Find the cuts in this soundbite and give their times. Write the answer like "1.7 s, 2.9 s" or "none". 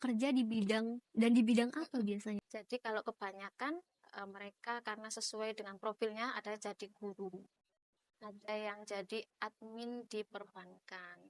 2.4 s